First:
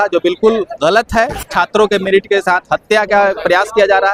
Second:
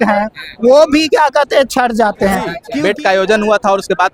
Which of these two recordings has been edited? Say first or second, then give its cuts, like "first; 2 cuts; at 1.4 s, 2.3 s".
second; 1 cut; at 2.6 s